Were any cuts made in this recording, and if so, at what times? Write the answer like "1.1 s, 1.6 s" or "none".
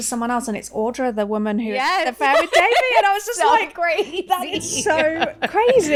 none